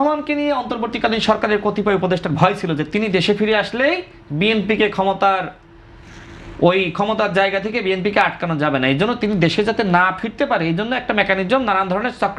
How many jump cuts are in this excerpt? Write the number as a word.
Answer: zero